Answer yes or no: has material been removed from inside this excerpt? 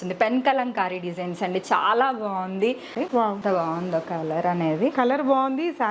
yes